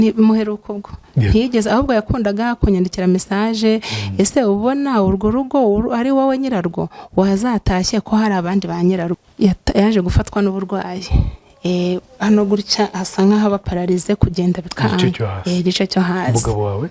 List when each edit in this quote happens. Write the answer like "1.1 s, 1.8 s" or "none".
9.2 s

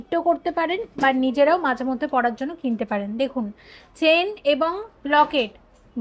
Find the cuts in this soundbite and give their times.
none

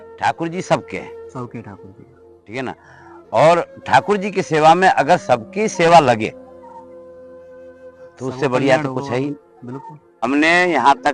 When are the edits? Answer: 10.0 s

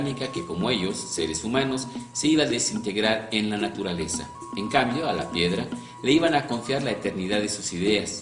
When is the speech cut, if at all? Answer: 6.8 s

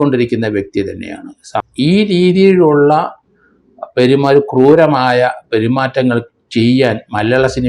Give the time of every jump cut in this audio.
1.7 s

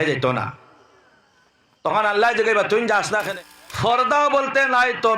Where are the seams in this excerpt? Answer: 3.3 s

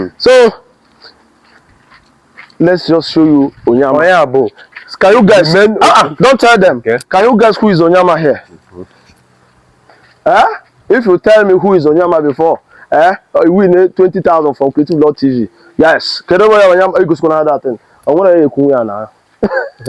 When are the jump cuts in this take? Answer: none

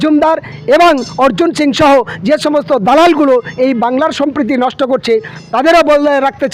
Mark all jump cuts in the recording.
none

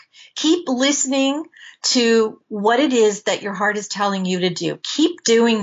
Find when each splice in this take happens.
2.4 s

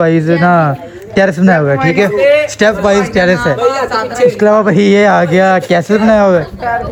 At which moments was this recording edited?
none

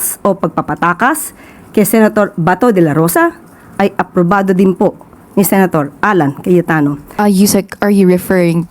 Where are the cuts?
7.0 s

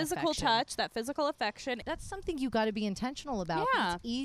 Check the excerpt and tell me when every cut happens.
1.8 s

